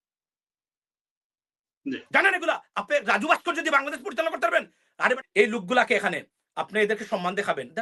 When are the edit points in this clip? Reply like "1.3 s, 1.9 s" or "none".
5.2 s